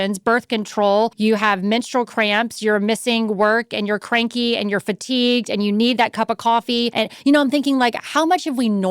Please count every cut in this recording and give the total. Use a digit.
2